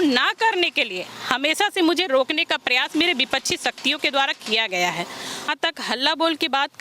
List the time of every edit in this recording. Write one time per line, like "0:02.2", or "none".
0:05.5